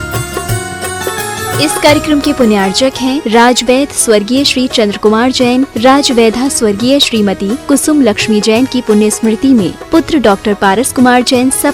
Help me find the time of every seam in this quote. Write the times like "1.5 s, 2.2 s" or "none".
none